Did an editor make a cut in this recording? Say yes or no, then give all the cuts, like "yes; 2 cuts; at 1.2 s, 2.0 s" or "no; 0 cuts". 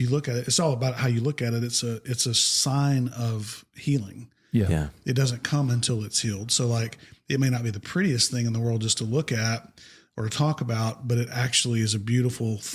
no; 0 cuts